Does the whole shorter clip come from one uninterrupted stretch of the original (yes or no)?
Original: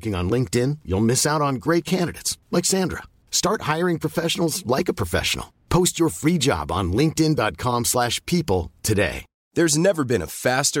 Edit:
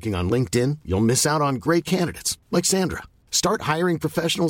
yes